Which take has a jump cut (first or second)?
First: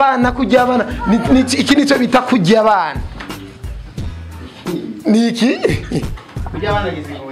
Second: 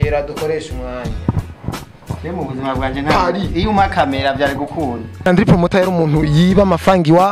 second